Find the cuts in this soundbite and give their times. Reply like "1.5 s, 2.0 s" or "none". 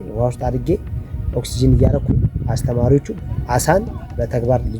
3.1 s